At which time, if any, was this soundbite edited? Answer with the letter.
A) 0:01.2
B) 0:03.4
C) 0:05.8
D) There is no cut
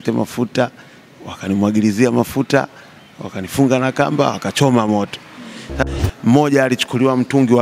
C